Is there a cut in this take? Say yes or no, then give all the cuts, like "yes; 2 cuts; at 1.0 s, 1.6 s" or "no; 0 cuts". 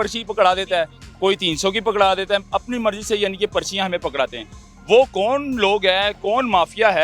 no; 0 cuts